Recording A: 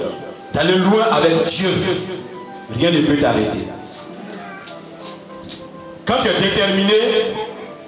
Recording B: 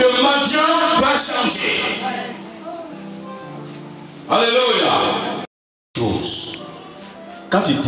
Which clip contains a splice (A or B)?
B